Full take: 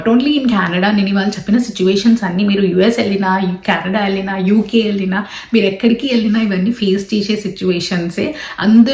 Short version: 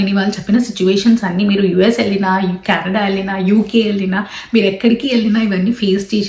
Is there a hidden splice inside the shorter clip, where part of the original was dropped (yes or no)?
no